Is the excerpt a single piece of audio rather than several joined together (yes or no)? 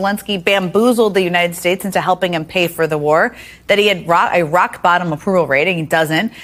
yes